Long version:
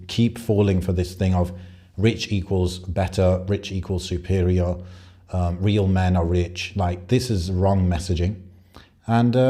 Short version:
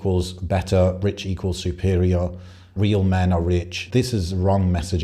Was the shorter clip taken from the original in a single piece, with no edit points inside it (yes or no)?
no